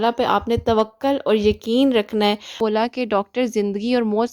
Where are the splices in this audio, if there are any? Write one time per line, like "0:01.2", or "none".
0:02.5